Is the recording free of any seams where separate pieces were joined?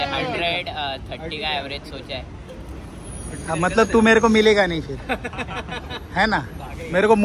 yes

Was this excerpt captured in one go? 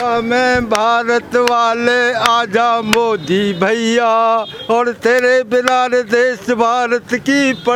yes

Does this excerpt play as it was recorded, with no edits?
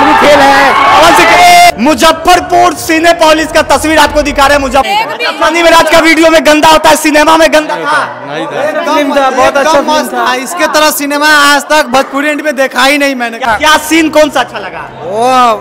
no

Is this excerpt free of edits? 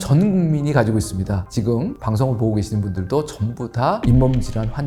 yes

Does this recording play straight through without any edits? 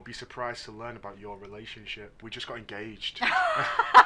yes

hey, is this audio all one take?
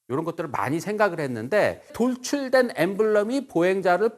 no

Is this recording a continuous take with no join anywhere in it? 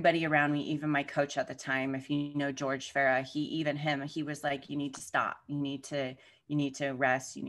yes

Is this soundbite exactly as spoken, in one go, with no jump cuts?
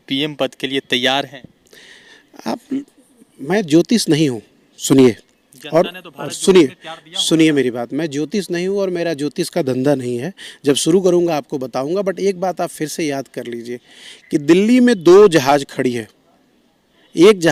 yes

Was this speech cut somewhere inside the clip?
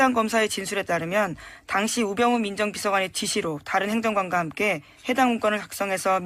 yes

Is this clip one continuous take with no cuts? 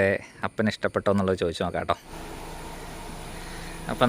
no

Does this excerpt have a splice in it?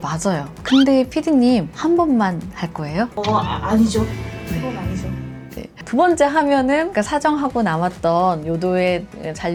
no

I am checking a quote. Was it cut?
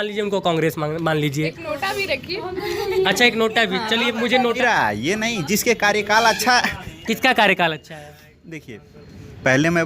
yes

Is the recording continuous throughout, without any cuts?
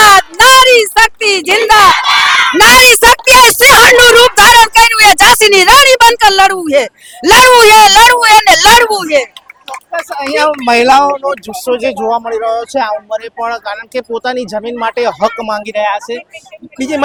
yes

